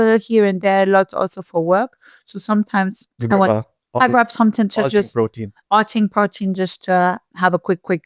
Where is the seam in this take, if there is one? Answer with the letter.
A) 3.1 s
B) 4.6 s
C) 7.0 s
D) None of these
A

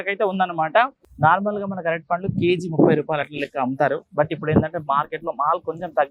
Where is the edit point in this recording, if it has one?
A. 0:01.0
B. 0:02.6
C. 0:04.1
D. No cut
A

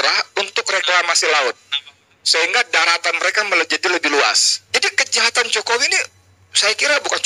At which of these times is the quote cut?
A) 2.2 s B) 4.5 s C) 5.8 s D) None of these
B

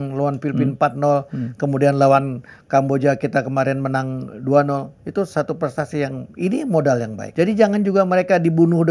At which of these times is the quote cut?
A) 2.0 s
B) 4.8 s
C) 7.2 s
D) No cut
C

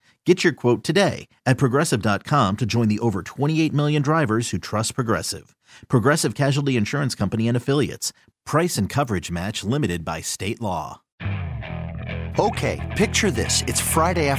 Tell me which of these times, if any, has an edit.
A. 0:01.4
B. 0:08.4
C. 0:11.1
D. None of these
C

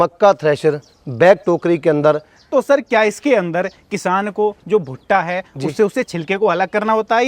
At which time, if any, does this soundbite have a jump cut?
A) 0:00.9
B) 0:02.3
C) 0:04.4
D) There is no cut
B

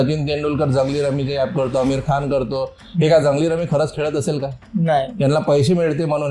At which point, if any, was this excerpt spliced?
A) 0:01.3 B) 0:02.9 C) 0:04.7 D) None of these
D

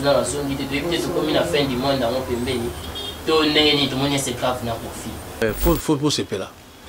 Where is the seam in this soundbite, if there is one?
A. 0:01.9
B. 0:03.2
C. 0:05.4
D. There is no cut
C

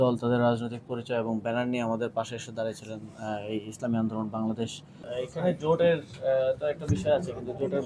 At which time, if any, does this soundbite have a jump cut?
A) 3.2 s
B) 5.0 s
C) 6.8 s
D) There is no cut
B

